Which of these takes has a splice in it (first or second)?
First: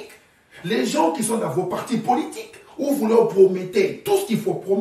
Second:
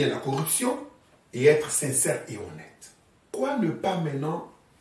second